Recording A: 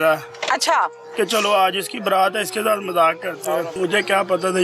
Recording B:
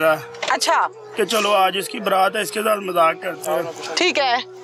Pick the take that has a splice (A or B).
A